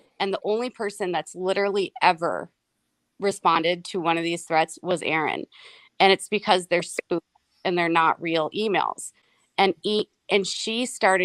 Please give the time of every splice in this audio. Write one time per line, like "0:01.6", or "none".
none